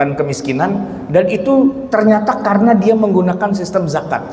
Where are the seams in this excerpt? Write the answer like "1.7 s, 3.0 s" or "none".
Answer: none